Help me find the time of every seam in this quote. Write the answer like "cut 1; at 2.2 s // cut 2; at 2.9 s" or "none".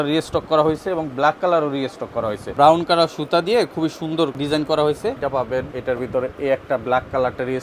cut 1; at 2.5 s // cut 2; at 4.4 s // cut 3; at 5.6 s